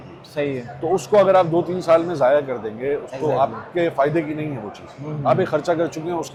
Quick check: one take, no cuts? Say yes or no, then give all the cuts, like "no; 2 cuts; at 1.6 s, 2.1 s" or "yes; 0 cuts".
yes; 0 cuts